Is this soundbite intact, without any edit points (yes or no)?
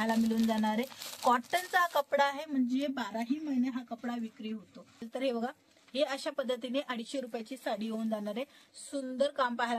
no